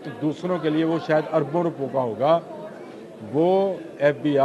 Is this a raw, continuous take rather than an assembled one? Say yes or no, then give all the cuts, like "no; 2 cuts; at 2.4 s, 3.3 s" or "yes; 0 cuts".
yes; 0 cuts